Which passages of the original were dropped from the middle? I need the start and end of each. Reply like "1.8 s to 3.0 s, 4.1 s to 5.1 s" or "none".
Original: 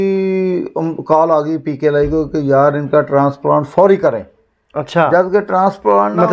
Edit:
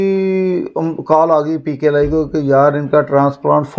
none